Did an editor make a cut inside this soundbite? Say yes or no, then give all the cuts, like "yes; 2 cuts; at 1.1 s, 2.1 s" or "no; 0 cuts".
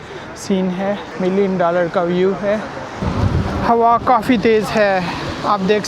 yes; 2 cuts; at 1.1 s, 3.0 s